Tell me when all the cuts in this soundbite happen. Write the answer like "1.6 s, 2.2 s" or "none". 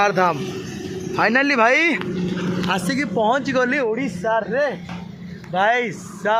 none